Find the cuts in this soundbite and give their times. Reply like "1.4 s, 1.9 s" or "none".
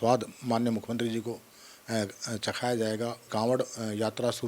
3.3 s